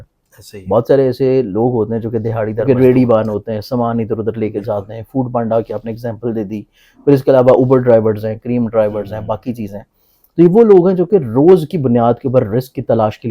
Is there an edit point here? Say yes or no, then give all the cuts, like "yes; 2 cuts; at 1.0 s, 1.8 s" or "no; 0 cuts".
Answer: yes; 1 cut; at 2.6 s